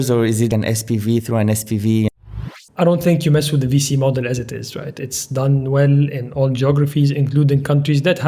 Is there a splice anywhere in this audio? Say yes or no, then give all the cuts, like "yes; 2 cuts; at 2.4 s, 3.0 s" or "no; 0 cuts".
yes; 1 cut; at 2.2 s